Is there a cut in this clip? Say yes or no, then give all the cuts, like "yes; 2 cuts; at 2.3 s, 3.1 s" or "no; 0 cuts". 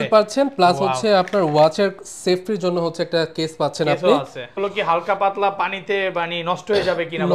yes; 1 cut; at 4.5 s